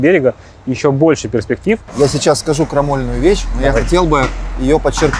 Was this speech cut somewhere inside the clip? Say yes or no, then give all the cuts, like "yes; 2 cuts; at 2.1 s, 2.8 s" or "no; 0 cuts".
yes; 1 cut; at 1.9 s